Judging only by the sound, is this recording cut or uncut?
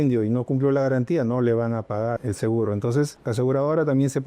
cut